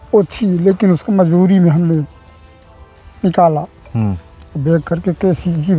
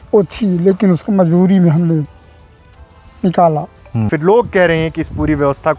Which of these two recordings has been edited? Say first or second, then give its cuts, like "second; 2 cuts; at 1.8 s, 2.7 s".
second; 1 cut; at 4.1 s